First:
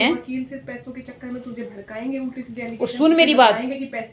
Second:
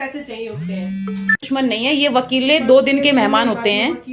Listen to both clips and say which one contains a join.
second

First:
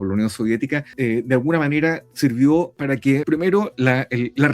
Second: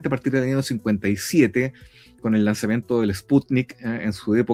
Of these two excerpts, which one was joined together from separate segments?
first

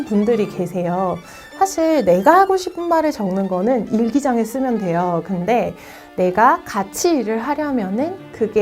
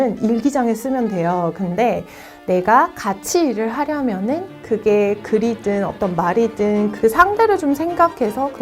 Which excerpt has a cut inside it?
second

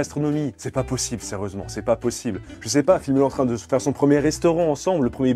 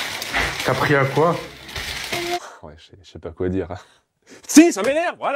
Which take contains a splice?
second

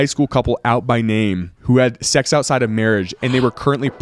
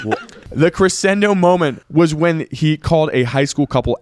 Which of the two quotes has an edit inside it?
second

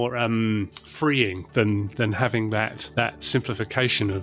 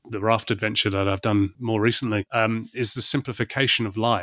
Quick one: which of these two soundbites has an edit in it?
second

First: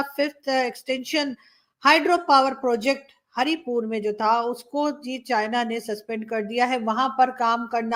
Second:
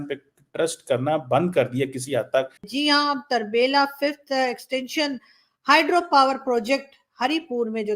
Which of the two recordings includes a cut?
second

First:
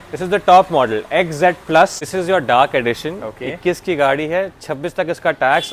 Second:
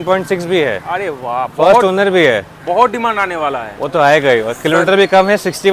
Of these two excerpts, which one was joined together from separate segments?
first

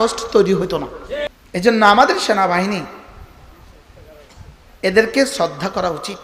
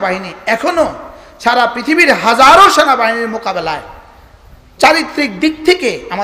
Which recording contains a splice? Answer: first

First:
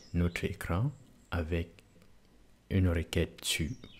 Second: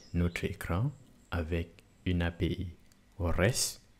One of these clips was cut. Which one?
first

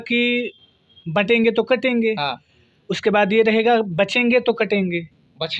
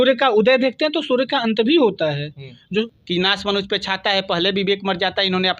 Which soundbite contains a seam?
second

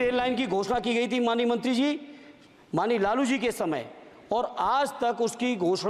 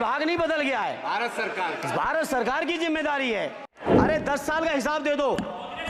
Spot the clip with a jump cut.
second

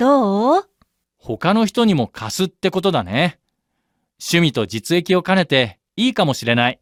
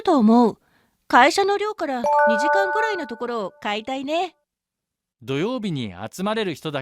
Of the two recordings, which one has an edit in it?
second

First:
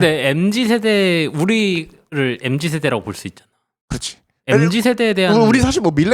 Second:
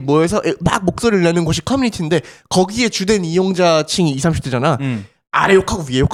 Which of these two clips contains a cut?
first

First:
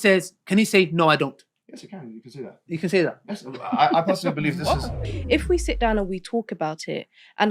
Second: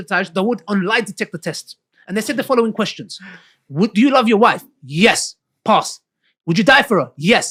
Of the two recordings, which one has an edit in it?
first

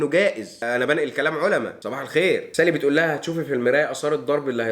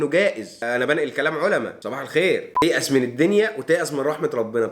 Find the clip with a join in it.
second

